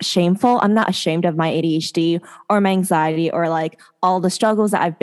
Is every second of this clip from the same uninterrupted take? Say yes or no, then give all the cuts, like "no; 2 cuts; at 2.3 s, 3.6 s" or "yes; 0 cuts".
yes; 0 cuts